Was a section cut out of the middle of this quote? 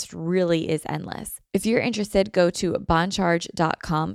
yes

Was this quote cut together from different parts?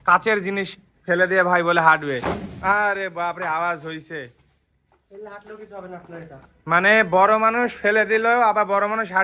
no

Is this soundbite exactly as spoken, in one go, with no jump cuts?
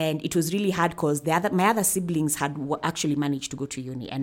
yes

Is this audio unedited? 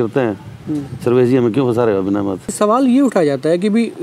no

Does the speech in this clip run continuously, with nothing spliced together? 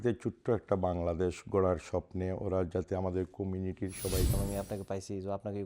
no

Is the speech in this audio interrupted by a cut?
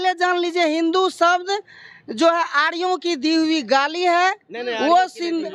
no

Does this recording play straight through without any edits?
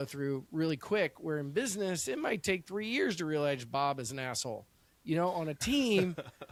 yes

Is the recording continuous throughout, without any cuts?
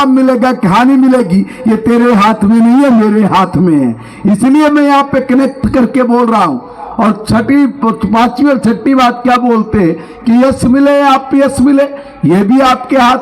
yes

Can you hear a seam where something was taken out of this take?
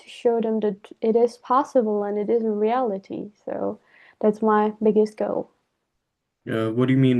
no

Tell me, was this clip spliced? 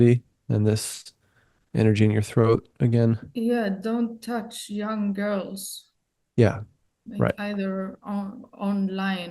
yes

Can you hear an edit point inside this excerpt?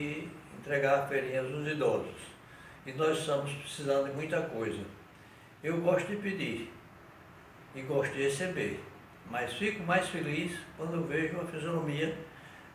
no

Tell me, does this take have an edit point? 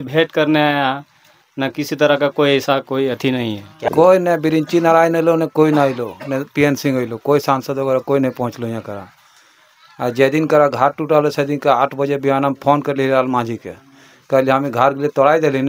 yes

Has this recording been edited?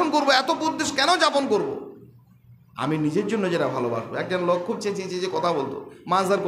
no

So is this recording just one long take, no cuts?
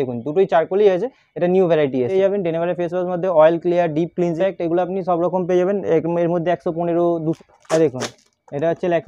no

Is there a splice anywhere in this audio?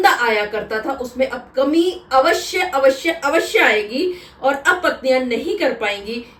no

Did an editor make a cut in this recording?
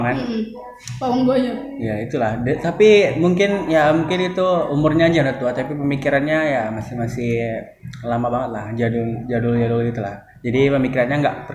no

